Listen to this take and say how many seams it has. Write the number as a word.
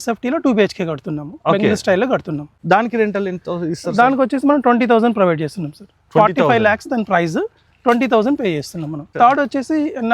two